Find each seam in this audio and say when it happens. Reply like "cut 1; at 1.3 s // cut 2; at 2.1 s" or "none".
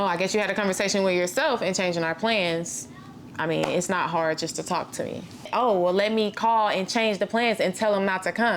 cut 1; at 5.5 s